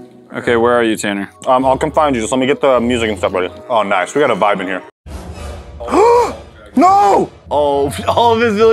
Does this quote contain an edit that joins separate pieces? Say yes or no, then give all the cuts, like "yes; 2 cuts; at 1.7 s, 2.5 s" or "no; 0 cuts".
no; 0 cuts